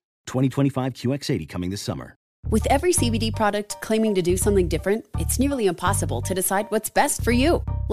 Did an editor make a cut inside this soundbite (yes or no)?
yes